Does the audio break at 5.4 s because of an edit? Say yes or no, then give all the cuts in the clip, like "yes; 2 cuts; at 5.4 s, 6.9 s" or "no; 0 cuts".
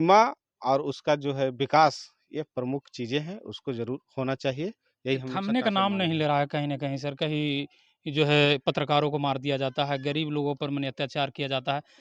no; 0 cuts